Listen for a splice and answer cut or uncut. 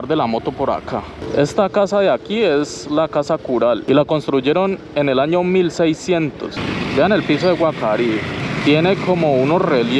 cut